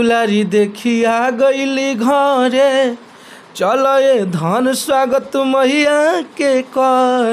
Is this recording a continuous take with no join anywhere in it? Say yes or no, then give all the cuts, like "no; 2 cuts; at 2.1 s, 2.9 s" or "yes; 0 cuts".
yes; 0 cuts